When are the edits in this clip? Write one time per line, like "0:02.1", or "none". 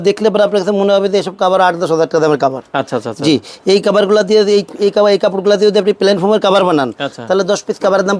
none